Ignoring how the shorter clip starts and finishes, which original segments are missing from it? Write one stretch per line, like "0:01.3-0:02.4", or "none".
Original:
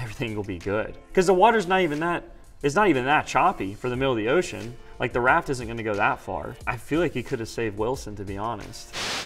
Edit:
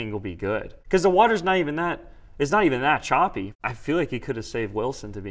0:03.8-0:06.6